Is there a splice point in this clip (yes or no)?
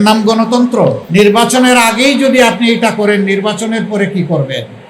yes